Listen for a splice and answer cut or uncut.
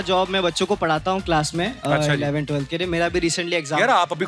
uncut